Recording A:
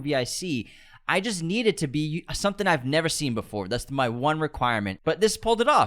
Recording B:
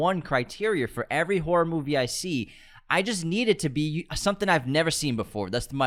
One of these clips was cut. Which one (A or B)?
A